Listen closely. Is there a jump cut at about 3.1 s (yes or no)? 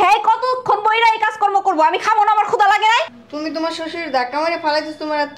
yes